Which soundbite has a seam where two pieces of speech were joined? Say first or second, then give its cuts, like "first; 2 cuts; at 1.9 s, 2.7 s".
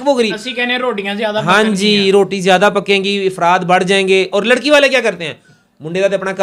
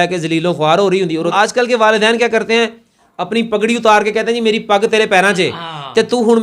second; 1 cut; at 1.3 s